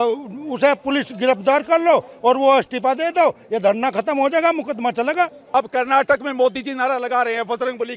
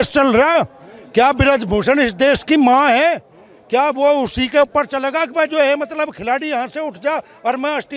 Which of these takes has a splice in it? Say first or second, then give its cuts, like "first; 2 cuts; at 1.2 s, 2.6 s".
first; 1 cut; at 5.4 s